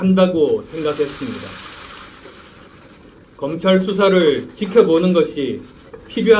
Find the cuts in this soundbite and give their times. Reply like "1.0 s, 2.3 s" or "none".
4.5 s